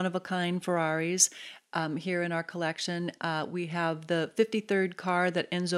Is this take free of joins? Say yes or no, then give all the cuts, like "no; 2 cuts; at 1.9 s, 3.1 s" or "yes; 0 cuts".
yes; 0 cuts